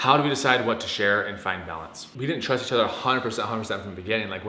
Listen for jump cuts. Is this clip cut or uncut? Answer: cut